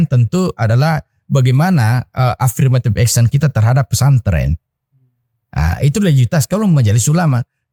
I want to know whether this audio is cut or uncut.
uncut